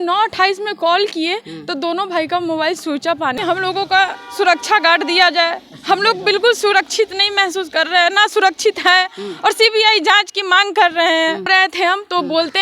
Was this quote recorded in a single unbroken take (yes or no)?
no